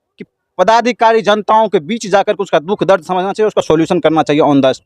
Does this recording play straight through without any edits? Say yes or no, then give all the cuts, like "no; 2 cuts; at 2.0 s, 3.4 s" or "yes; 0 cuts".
yes; 0 cuts